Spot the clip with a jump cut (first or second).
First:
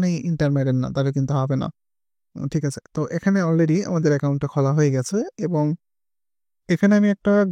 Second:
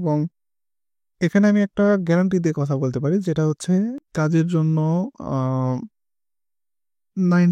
second